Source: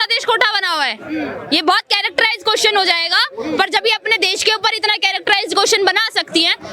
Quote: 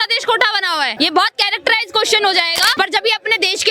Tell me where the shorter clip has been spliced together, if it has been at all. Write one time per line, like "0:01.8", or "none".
0:00.9
0:02.8